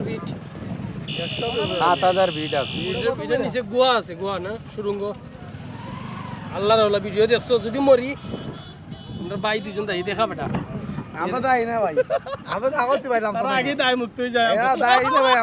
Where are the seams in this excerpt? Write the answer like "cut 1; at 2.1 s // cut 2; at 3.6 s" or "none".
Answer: none